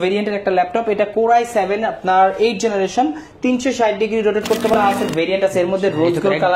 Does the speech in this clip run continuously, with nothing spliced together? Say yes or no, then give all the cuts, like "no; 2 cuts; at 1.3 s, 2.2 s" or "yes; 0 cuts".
no; 1 cut; at 4.7 s